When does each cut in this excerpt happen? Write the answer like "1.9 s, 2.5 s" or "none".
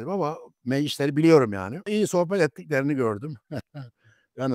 1.9 s